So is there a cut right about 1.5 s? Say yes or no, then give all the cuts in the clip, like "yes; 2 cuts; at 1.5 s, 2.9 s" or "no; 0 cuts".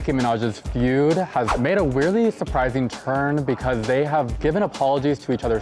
yes; 1 cut; at 1.5 s